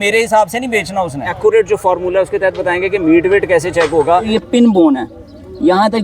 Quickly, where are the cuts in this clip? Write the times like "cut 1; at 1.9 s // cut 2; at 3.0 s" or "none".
cut 1; at 1.3 s // cut 2; at 4.3 s

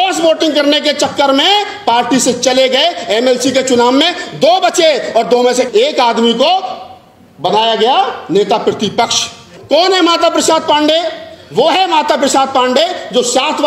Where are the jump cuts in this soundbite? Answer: cut 1; at 9.5 s

